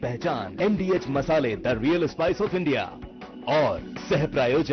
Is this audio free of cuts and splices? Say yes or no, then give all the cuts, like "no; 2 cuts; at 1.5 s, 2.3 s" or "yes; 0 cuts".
yes; 0 cuts